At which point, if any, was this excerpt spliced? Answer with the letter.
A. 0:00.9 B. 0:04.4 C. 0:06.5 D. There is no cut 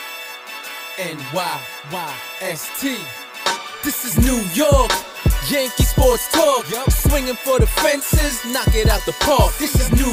A